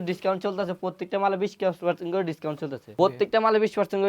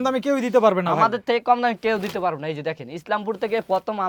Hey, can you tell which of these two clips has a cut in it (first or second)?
first